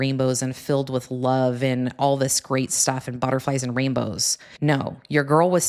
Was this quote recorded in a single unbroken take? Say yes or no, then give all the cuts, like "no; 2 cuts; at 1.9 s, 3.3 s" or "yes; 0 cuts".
yes; 0 cuts